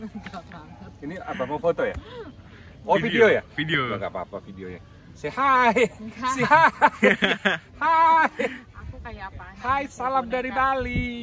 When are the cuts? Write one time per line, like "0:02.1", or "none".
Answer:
none